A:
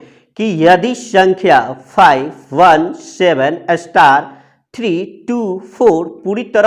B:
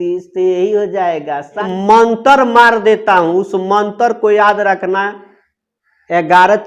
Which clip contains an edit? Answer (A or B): B